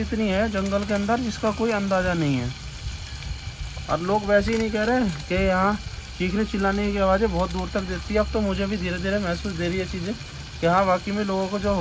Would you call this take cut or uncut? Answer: uncut